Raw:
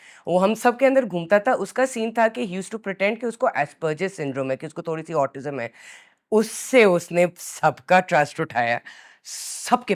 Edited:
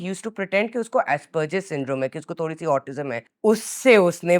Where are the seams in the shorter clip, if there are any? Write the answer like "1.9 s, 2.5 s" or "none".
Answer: 3.2 s

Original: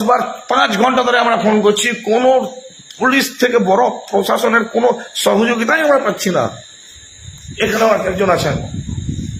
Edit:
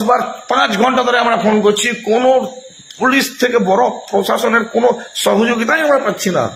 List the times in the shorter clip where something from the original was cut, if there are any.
none

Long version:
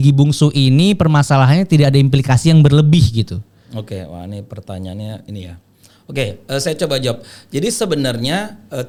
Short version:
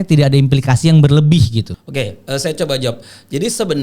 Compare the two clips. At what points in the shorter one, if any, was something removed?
1.8 s

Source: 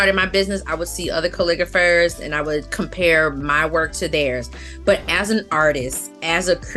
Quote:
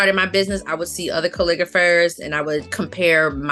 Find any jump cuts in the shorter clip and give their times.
none

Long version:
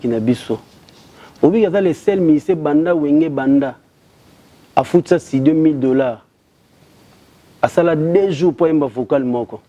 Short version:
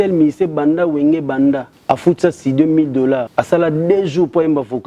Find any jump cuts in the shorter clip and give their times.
1.7 s, 3.3 s

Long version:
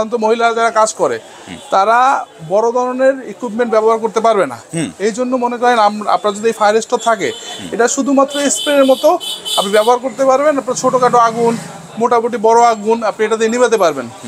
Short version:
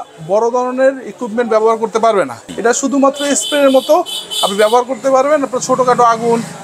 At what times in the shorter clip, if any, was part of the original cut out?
2.4 s

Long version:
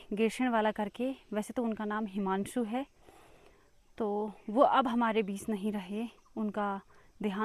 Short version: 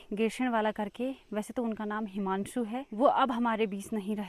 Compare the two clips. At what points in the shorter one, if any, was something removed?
2.9 s

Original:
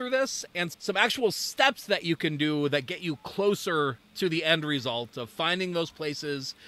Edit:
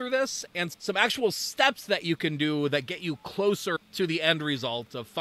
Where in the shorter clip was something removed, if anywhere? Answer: 3.7 s

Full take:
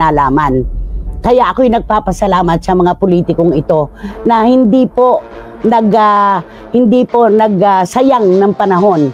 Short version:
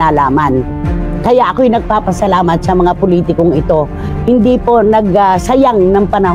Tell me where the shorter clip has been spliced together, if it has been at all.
4.1 s

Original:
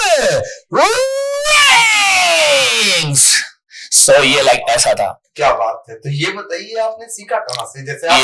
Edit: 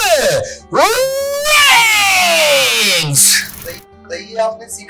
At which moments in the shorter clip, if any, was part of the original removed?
4.0 s

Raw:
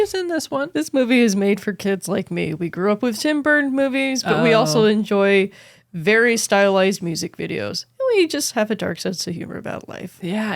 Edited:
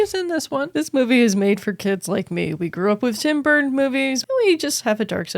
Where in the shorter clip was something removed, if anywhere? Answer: 4.2 s

